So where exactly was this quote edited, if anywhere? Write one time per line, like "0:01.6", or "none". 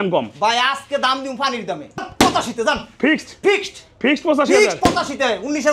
0:02.0